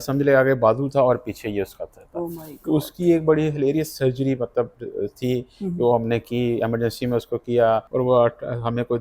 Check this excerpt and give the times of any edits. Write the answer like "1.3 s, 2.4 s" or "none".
7.9 s